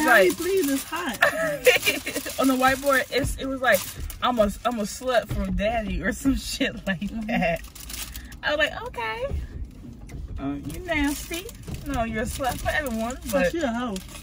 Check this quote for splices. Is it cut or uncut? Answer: uncut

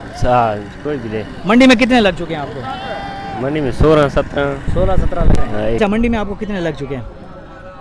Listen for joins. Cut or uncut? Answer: cut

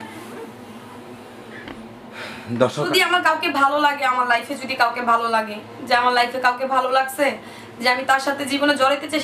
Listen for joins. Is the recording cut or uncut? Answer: cut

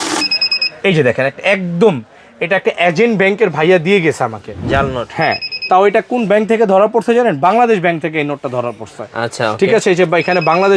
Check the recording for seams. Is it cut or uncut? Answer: uncut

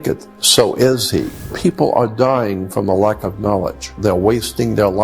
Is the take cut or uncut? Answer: cut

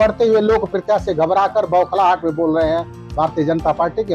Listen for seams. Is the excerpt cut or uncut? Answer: uncut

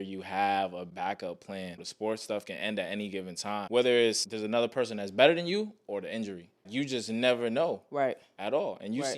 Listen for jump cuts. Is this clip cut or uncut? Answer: cut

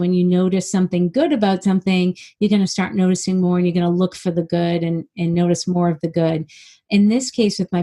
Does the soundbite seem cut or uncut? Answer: uncut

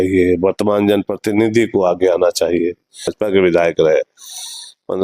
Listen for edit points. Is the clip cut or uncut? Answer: cut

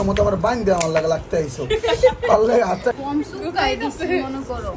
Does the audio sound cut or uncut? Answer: cut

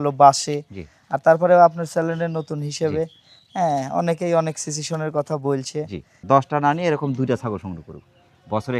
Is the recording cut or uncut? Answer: cut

